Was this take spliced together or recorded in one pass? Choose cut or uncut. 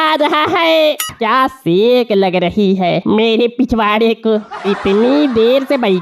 cut